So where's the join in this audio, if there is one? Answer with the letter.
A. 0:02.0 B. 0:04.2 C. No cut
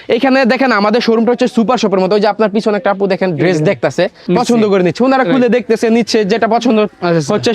B